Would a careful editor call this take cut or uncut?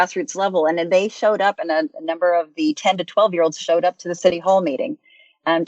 cut